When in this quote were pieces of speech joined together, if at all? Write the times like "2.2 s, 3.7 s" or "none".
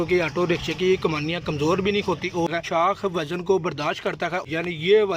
2.5 s, 4.4 s